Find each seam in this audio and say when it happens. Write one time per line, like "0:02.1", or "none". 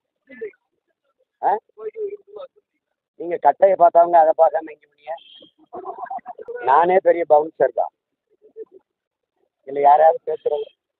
0:06.4